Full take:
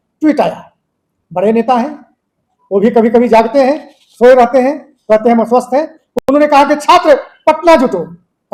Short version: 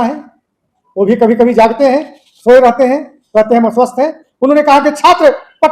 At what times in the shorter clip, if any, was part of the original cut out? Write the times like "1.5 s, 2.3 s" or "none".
4.3 s